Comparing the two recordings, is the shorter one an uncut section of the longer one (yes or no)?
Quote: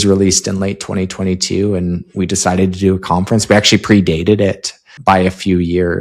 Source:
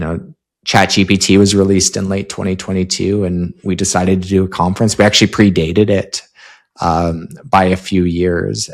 no